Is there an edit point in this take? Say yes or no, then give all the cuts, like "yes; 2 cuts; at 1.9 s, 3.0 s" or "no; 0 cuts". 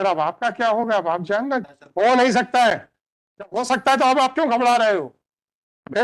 yes; 1 cut; at 1.6 s